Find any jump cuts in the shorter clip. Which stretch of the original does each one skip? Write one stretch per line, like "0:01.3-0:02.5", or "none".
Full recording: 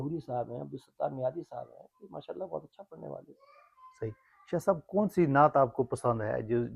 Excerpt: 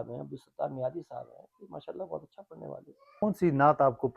0:03.6-0:05.0